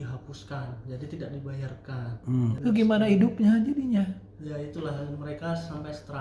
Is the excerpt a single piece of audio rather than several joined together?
no; 1 cut; at 2.5 s

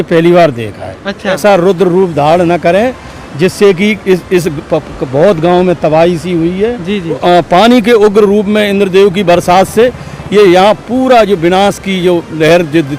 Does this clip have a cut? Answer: yes; 2 cuts; at 1.4 s, 7.2 s

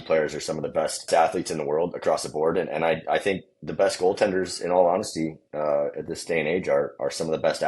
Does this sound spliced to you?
yes; 1 cut; at 1.1 s

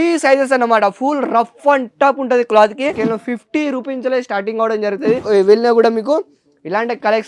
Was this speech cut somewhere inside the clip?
yes; 2 cuts; at 3.0 s, 5.2 s

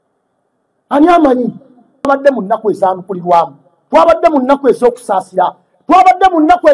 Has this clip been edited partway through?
yes; 1 cut; at 2.1 s

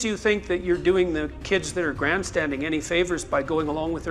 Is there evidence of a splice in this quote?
no; 0 cuts

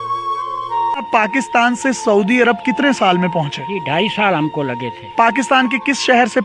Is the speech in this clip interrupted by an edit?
yes; 1 cut; at 0.9 s

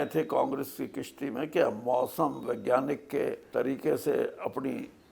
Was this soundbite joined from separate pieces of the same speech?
yes; 1 cut; at 3.4 s

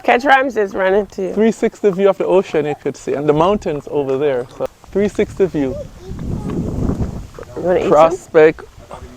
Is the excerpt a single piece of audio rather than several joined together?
no; 1 cut; at 4.7 s

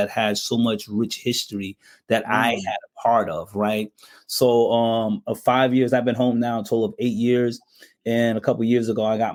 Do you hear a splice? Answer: no; 0 cuts

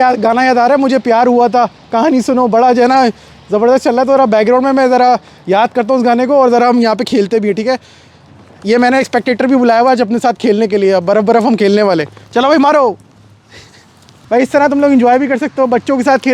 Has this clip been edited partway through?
no; 0 cuts

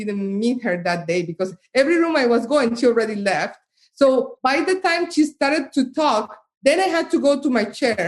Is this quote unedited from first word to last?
yes; 0 cuts

